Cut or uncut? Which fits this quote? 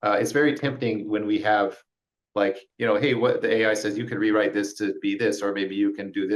cut